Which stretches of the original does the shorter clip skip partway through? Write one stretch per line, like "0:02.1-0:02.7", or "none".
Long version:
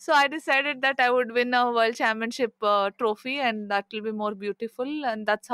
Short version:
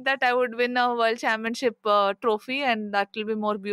none